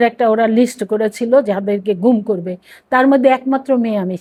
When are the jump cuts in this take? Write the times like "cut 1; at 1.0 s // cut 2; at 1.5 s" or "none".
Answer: none